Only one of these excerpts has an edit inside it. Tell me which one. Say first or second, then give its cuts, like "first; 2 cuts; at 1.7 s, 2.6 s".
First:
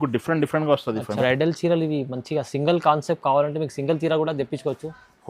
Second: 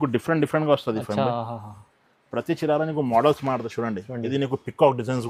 first; 1 cut; at 1.1 s